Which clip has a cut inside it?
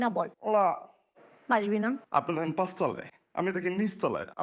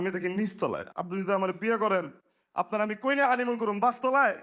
first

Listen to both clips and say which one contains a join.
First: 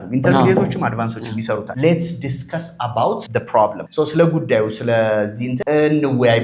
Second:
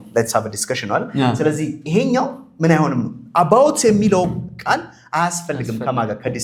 first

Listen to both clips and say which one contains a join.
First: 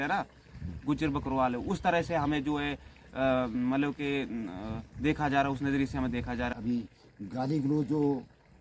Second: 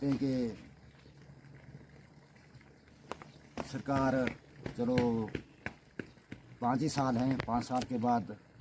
first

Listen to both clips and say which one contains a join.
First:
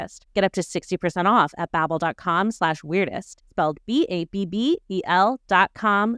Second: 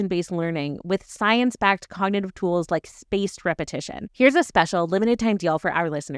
second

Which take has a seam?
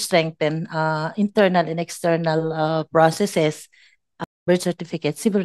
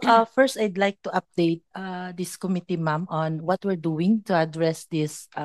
first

